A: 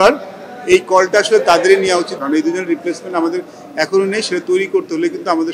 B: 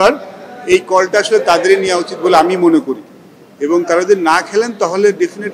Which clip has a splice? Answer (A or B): A